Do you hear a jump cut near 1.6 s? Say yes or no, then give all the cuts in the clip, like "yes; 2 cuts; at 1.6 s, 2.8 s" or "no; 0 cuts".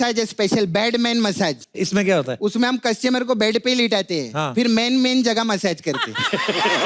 yes; 1 cut; at 1.6 s